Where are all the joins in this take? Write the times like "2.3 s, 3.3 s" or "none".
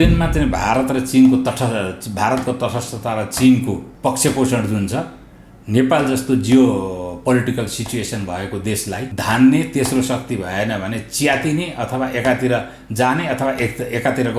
3.9 s, 9.1 s